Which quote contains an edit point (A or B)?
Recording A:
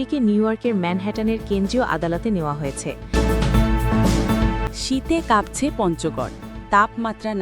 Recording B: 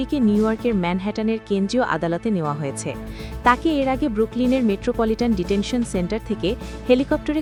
A